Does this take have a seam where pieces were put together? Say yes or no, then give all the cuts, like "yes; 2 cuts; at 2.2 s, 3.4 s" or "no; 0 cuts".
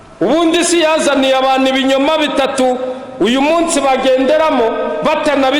no; 0 cuts